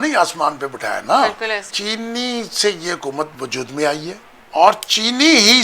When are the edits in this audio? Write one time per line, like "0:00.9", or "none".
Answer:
0:01.6
0:03.3
0:04.3

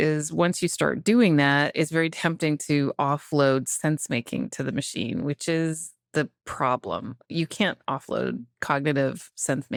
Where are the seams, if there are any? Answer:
none

